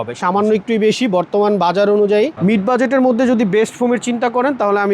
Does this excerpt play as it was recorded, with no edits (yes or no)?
no